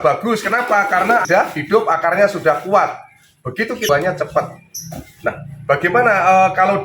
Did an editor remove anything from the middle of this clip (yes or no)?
yes